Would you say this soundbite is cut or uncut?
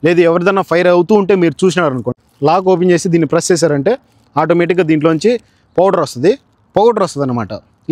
uncut